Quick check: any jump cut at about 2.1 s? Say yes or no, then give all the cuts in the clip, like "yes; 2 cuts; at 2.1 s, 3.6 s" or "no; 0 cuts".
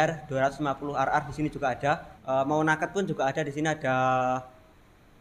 yes; 1 cut; at 2.1 s